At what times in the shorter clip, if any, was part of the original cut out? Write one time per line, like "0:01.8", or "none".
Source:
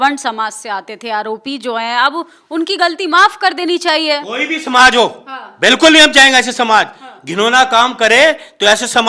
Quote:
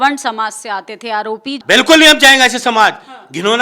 0:01.5